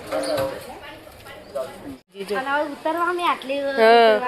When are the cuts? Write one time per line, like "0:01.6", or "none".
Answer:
0:02.2